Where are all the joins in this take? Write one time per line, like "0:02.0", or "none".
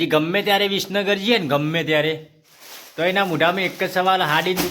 0:01.4